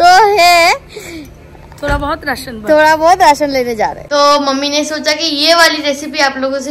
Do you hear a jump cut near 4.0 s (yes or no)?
yes